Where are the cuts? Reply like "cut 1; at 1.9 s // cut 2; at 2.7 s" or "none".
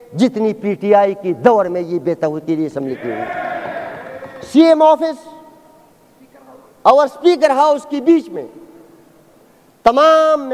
cut 1; at 4.3 s